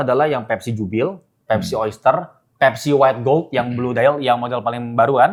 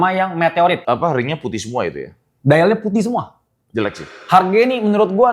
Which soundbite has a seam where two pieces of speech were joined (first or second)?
second